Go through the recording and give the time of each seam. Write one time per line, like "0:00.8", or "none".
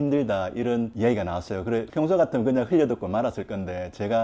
none